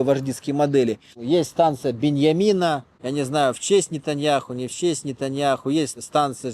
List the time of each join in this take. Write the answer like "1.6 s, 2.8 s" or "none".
1.0 s